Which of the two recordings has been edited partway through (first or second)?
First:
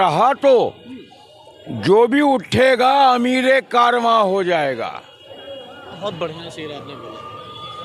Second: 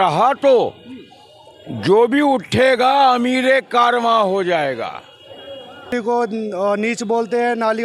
second